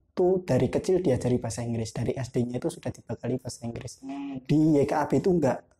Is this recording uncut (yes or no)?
yes